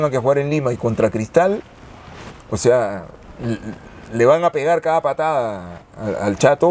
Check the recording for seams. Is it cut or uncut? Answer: uncut